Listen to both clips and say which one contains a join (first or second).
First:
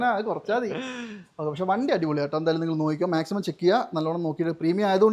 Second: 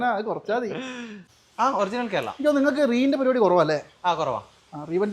second